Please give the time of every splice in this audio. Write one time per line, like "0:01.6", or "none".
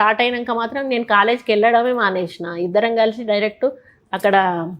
none

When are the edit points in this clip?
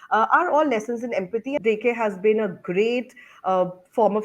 0:01.6

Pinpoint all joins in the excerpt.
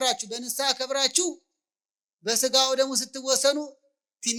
none

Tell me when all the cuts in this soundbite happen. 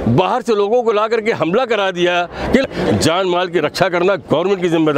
0:02.7

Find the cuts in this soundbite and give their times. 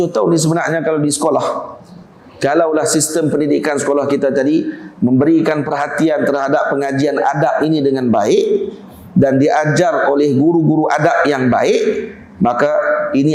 none

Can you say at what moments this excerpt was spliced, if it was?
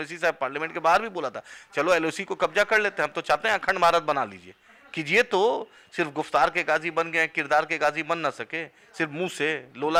none

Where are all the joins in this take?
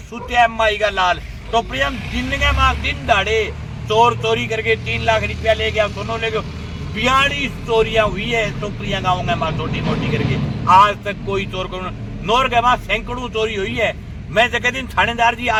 none

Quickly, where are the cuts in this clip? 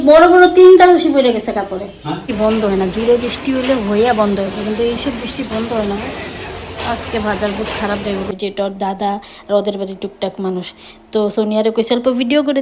0:02.3
0:08.3

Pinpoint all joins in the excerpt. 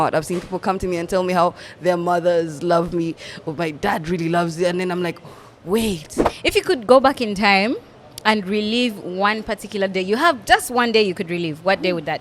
0:06.3

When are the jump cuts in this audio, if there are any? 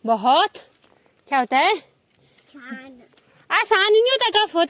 none

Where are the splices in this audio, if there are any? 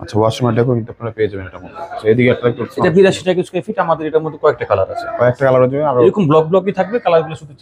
none

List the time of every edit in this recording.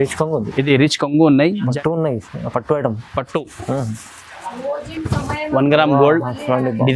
0:01.7

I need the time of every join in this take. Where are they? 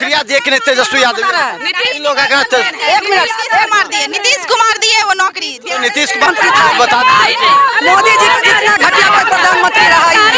0:06.3

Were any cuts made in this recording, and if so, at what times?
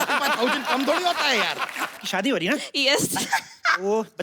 0:02.0

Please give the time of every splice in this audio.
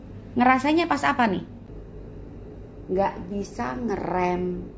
0:01.5

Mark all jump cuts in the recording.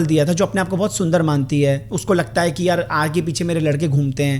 none

